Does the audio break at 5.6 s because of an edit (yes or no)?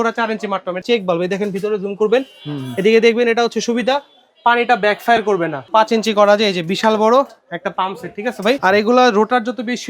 yes